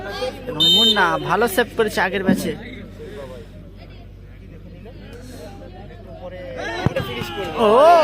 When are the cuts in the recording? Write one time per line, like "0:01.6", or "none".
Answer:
none